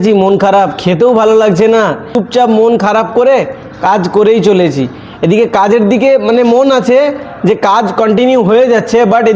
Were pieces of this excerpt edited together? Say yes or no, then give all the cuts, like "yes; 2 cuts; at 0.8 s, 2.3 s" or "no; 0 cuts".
yes; 1 cut; at 2.2 s